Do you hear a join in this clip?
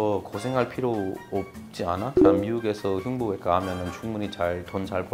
no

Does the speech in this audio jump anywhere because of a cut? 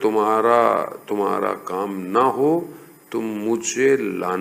no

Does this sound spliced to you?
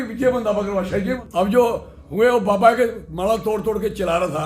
yes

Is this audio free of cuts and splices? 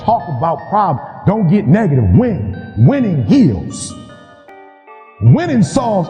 yes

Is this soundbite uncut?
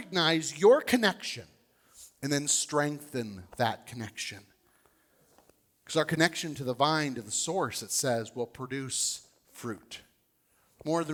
yes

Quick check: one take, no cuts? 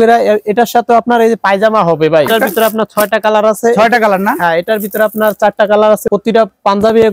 no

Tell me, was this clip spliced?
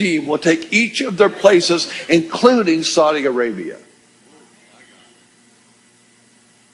yes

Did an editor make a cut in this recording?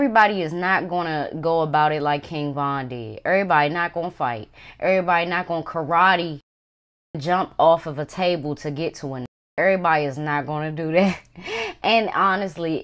no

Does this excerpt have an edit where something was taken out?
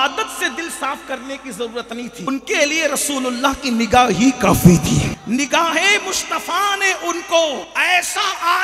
yes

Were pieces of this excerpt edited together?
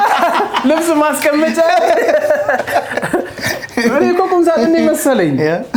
no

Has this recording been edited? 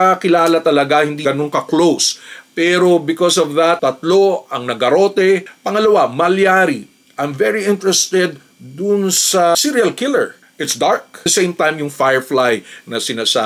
yes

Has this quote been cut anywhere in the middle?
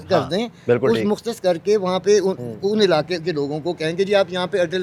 no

